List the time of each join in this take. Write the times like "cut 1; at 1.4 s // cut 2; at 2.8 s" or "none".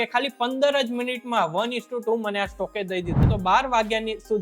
cut 1; at 3.3 s